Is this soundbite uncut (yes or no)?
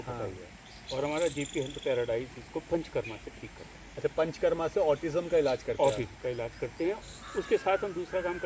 no